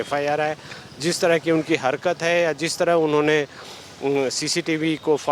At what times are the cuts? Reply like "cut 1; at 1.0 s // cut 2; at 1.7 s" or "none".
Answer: none